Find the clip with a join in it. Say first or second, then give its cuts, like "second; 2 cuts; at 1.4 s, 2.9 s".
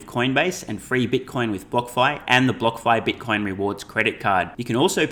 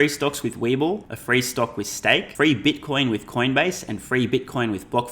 second; 2 cuts; at 1.1 s, 2.3 s